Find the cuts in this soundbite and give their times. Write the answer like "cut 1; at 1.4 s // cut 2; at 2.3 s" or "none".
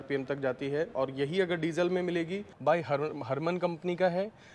cut 1; at 2.4 s